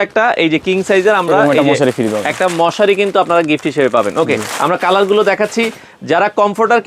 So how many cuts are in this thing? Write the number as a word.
zero